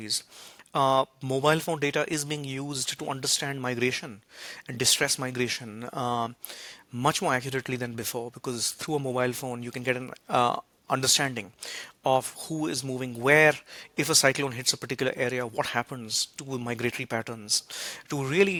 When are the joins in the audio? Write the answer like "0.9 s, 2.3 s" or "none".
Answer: none